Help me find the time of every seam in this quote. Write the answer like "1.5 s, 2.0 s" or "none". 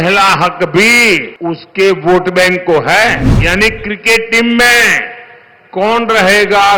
1.3 s, 3.3 s